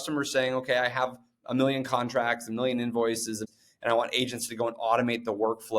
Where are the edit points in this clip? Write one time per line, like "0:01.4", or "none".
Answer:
0:03.4